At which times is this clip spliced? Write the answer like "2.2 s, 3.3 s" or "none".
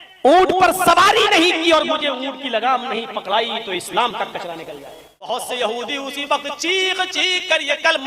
5.3 s